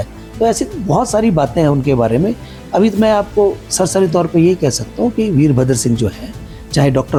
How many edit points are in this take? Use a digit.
0